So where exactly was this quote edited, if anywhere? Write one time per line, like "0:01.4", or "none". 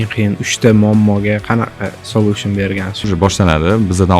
0:03.1